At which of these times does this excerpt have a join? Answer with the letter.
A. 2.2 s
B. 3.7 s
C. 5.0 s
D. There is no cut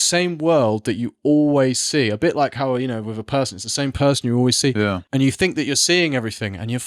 C